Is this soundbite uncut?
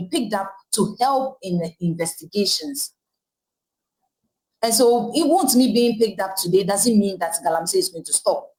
yes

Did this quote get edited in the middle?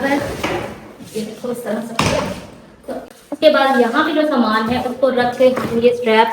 yes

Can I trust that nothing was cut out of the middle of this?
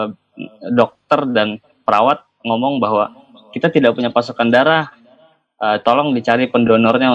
yes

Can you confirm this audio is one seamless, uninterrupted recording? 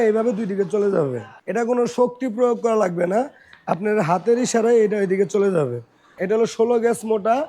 no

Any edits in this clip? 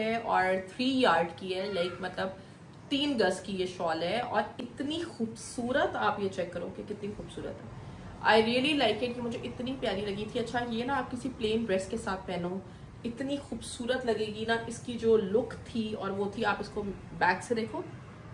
no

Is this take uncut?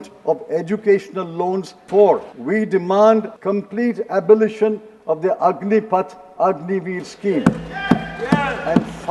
no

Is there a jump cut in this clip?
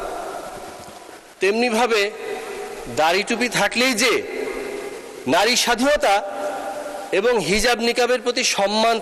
no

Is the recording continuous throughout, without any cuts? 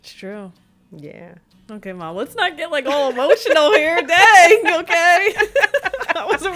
yes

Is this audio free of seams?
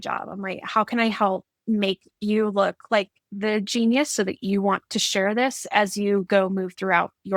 yes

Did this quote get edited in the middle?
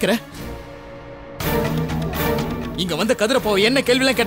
no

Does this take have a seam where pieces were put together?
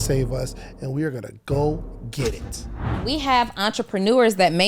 yes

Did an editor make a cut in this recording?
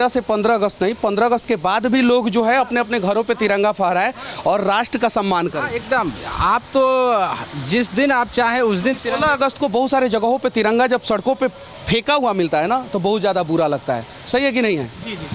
no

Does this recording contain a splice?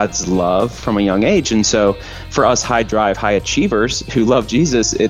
no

